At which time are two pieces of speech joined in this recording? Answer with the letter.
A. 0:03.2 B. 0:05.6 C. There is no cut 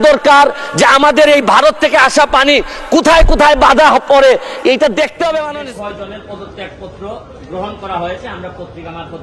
B